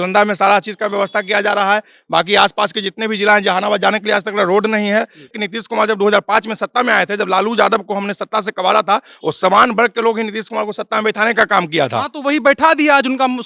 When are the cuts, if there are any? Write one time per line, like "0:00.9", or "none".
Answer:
0:05.4

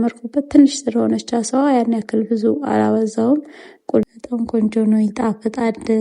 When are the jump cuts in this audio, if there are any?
0:04.0

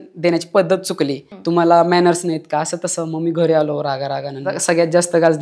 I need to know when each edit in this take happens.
0:01.3
0:04.5

